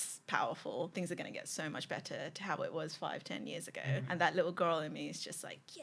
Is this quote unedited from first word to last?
no; 2 cuts; at 0.9 s, 4.1 s

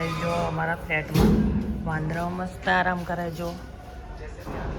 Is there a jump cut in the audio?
no; 0 cuts

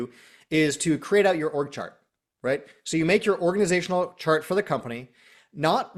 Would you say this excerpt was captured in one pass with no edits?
yes; 0 cuts

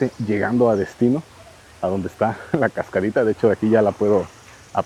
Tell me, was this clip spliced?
no; 0 cuts

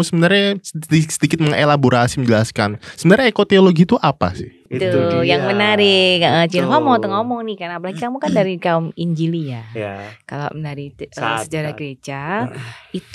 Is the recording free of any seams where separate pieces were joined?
no; 1 cut; at 4.6 s

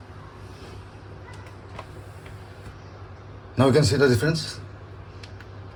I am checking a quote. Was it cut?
no; 0 cuts

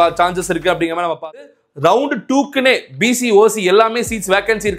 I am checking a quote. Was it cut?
yes; 1 cut; at 1.4 s

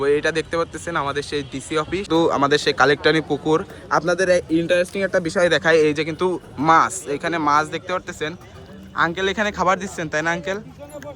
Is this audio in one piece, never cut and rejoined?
no; 1 cut; at 2.1 s

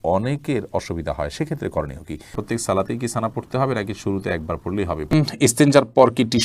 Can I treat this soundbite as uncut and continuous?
no; 2 cuts; at 2.4 s, 5.1 s

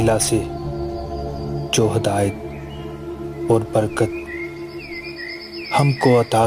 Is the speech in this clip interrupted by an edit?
no; 0 cuts

